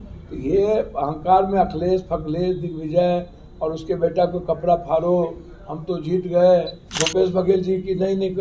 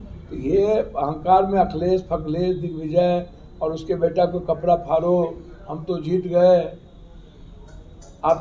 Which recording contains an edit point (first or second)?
first